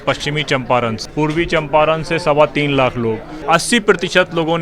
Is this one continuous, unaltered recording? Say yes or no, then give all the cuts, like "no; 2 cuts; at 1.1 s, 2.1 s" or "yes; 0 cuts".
no; 2 cuts; at 1.0 s, 3.3 s